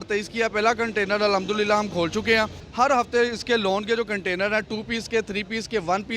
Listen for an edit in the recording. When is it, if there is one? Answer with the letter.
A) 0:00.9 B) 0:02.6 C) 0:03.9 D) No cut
B